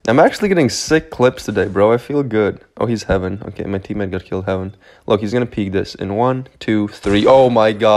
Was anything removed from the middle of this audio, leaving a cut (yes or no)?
no